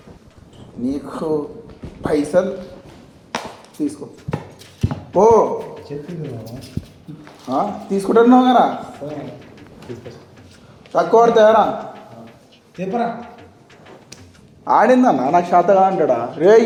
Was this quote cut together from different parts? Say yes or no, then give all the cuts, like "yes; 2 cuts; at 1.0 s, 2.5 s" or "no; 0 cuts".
no; 0 cuts